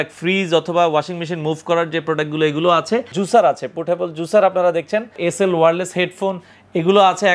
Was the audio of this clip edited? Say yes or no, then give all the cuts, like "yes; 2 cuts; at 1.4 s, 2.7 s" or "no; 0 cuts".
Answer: yes; 2 cuts; at 3.2 s, 5.2 s